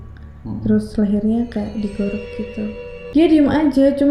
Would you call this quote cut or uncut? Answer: cut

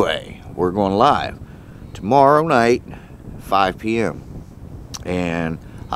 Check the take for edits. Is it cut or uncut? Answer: uncut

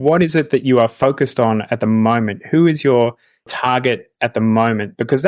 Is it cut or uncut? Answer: uncut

